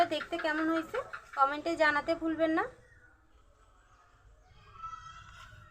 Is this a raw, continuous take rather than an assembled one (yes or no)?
no